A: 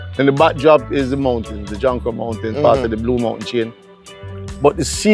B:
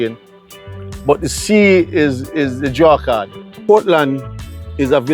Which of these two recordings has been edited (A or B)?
B